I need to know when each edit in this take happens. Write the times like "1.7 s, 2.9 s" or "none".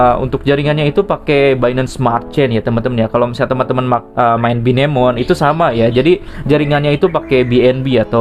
none